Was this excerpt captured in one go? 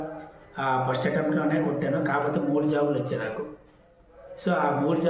yes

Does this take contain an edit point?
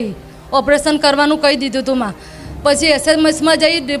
no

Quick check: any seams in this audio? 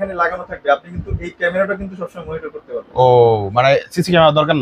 no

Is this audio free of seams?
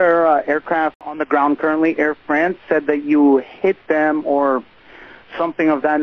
no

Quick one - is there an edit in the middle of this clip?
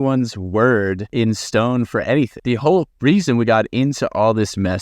yes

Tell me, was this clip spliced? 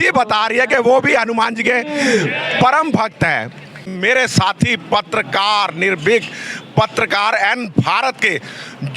yes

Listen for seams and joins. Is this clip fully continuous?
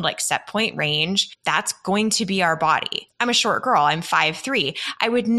no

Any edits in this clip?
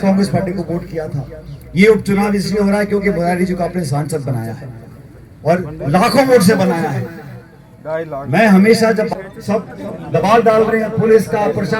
yes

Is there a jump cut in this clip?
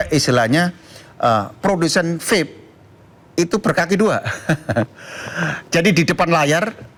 no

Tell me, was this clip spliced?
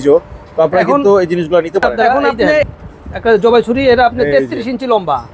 yes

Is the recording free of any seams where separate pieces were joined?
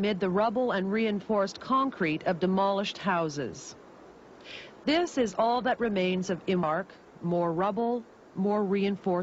yes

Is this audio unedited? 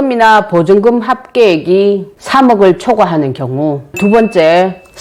yes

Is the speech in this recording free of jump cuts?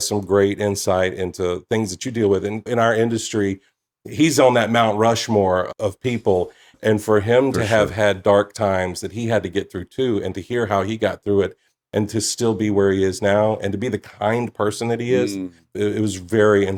yes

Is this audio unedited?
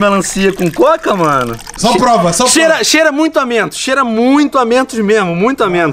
no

